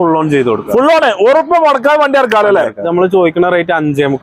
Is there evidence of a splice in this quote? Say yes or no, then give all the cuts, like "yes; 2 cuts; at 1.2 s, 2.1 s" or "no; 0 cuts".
yes; 1 cut; at 2.8 s